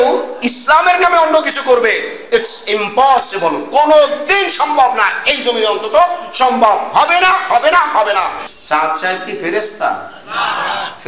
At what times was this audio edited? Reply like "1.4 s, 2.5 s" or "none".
8.4 s

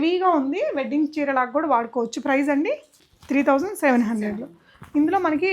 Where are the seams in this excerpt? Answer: none

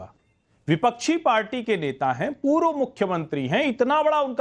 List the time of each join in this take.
none

